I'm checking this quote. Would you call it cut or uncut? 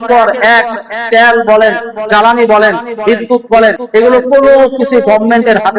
cut